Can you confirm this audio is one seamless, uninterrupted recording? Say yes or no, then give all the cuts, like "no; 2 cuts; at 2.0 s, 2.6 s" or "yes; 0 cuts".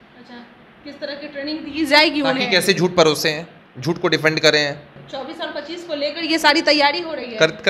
no; 1 cut; at 5.0 s